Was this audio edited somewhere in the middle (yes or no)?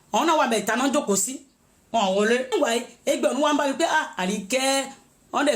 yes